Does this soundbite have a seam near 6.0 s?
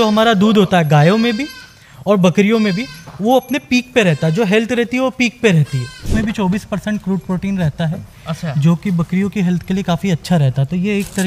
yes; 1 cut; at 6.0 s

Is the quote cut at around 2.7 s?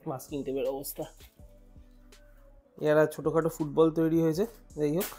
yes; 2 cuts; at 1.2 s, 2.7 s

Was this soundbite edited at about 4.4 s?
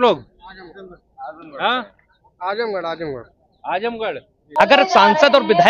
yes; 1 cut; at 4.4 s

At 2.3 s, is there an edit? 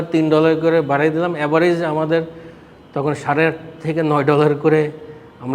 no; 0 cuts

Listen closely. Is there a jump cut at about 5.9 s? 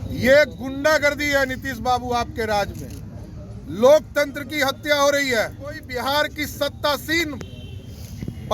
yes; 1 cut; at 5.9 s

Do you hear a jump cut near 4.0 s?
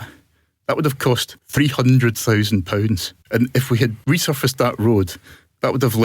yes; 1 cut; at 4.0 s

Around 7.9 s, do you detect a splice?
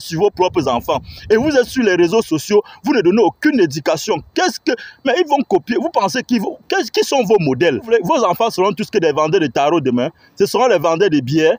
yes; 1 cut; at 7.9 s

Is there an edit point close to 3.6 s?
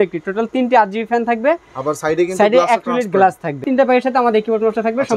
yes; 1 cut; at 3.6 s

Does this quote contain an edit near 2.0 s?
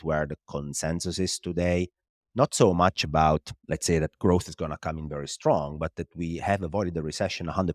no; 1 cut; at 3.6 s

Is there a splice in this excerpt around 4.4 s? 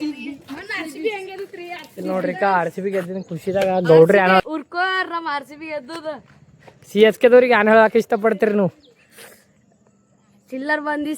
yes; 1 cut; at 4.4 s

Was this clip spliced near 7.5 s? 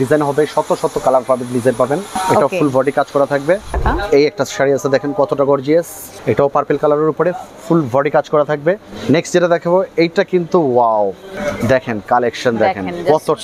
no; 5 cuts; at 2.1 s, 3.8 s, 6.0 s, 8.9 s, 11.3 s

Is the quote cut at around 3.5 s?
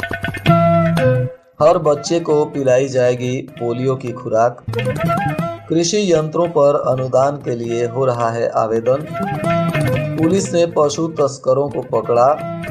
no; 1 cut; at 1.4 s

